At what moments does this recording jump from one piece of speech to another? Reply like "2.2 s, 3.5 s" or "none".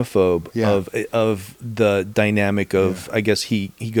none